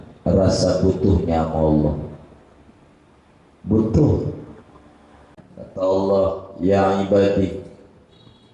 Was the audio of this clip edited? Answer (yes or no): yes